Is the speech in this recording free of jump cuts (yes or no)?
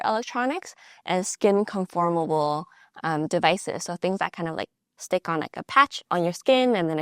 no